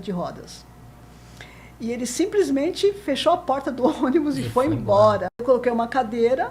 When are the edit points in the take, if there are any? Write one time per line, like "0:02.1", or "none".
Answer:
0:05.4